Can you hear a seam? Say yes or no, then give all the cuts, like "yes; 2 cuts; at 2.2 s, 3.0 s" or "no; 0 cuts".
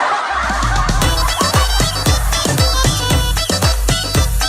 yes; 1 cut; at 3.0 s